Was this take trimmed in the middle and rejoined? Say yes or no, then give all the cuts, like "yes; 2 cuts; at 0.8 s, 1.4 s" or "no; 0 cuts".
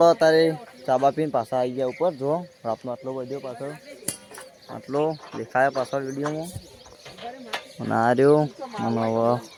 no; 0 cuts